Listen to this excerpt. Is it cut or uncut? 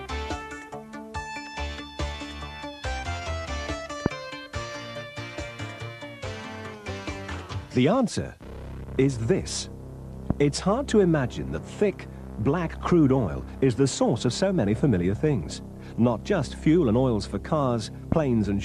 uncut